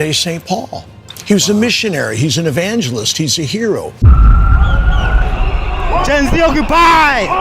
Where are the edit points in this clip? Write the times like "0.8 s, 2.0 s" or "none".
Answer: 3.9 s